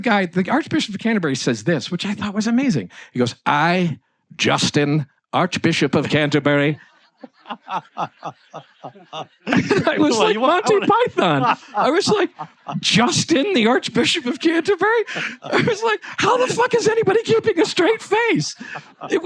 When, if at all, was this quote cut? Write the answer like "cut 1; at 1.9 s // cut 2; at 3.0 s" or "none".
none